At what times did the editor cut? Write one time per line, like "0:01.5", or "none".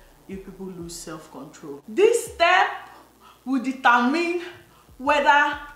0:01.8